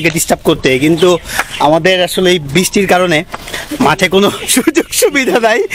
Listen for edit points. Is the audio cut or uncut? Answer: uncut